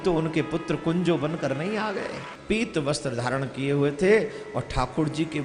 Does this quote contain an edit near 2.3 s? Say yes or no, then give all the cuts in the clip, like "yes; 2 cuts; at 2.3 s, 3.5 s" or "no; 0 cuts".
yes; 1 cut; at 2.3 s